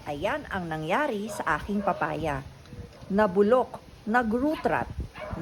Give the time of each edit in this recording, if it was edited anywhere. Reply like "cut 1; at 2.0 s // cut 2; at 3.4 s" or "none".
none